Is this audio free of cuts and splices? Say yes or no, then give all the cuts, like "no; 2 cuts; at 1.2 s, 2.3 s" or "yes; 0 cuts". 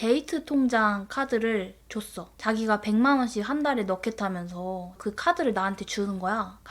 yes; 0 cuts